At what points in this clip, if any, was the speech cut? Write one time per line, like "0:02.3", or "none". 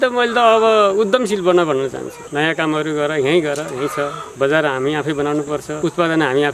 0:02.1
0:04.2
0:05.7